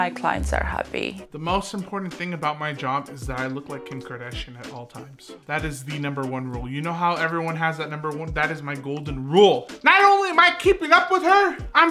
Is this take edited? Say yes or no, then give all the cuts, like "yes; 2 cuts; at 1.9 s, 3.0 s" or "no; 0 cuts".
no; 0 cuts